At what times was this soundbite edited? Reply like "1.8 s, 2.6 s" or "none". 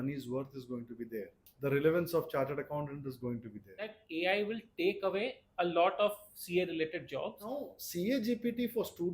1.4 s, 3.9 s, 7.8 s